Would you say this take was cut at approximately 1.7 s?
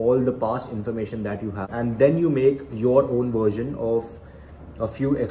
yes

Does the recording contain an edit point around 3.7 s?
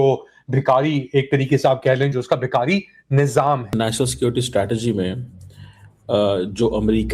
yes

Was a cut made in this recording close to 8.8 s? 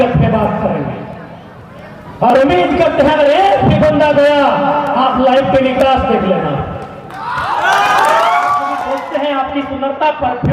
yes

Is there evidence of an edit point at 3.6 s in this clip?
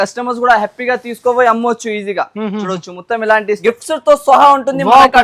yes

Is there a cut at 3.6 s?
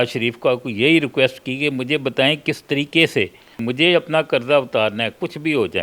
yes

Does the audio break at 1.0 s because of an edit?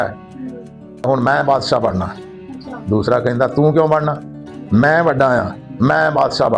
yes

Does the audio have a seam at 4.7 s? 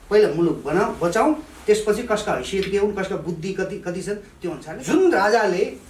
yes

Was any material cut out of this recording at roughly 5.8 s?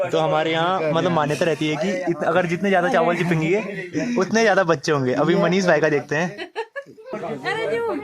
no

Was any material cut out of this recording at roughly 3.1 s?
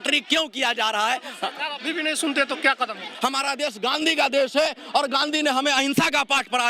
yes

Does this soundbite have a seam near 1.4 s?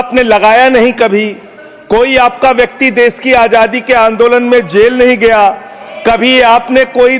no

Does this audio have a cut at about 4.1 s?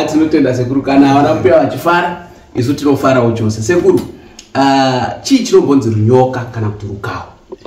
no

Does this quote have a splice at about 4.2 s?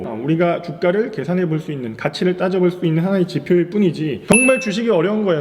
yes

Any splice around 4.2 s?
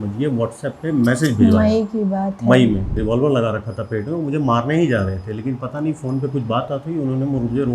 no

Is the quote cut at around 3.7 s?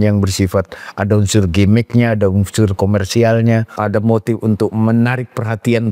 yes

